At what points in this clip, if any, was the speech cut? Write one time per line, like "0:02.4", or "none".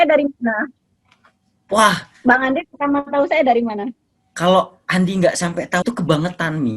0:05.8